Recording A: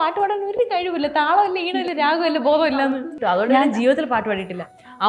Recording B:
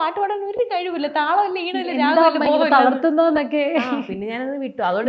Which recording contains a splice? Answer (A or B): A